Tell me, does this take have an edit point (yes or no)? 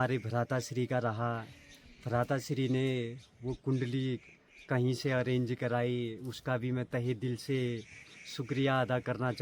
no